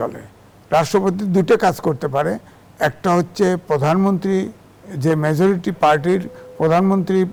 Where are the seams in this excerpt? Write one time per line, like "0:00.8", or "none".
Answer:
none

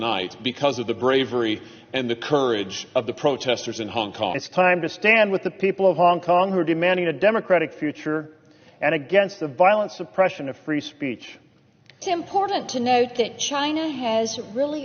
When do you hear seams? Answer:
0:04.4
0:12.0

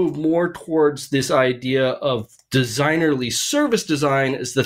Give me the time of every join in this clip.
none

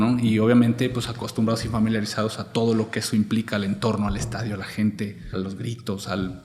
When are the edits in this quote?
0:05.3

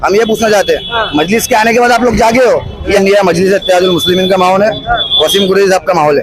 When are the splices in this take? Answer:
0:03.0

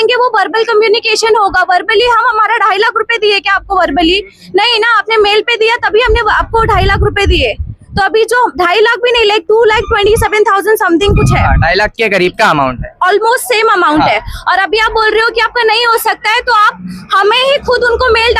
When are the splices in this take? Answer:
none

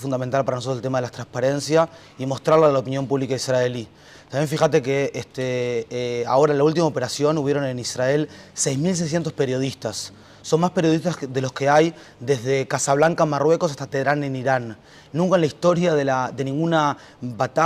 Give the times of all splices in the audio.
0:09.4

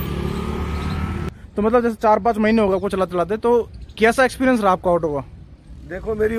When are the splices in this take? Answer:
0:01.4

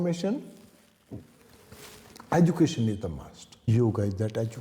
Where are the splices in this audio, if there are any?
0:03.7

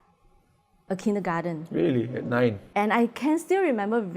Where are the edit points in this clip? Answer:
0:02.6

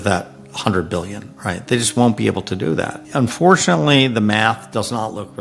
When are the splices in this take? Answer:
0:03.0

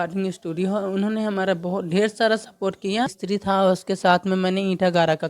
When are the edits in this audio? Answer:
0:03.2

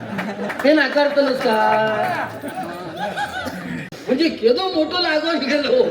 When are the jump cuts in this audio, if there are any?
0:03.9

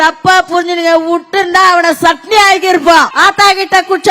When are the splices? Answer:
0:03.1

